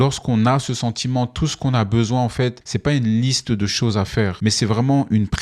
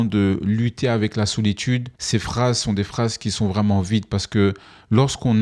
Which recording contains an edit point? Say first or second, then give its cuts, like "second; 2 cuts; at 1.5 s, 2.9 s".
first; 2 cuts; at 2.7 s, 4.3 s